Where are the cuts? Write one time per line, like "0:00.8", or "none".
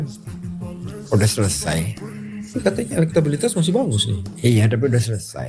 0:02.5